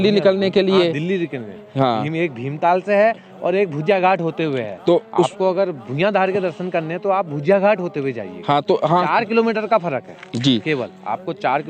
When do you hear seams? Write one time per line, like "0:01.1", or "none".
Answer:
none